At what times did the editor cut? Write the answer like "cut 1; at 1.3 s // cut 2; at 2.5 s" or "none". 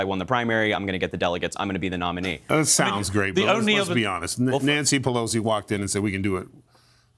cut 1; at 2.5 s